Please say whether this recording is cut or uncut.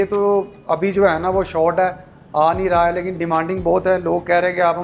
uncut